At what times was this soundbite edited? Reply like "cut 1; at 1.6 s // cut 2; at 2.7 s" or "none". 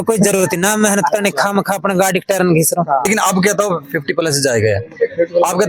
cut 1; at 3.1 s